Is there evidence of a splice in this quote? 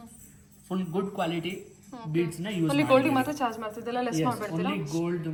no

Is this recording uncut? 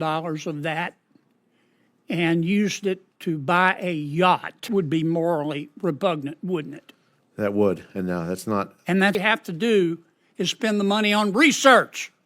no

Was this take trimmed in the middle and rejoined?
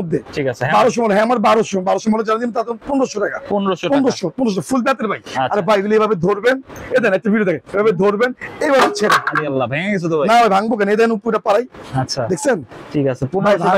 no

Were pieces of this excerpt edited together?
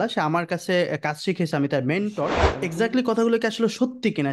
yes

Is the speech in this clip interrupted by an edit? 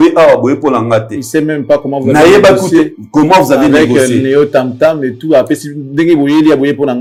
no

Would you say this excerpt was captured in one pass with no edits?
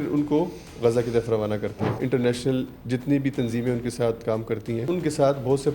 no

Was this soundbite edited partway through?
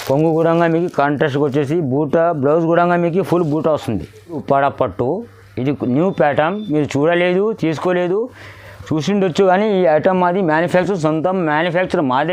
yes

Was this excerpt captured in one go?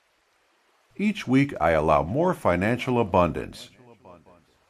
no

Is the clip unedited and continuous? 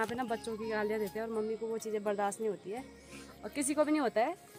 yes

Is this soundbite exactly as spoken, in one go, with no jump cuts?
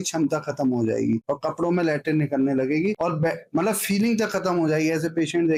yes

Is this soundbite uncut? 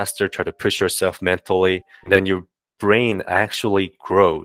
no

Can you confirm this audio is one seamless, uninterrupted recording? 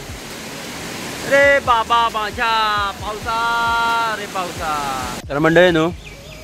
no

